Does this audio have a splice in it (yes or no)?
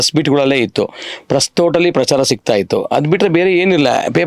no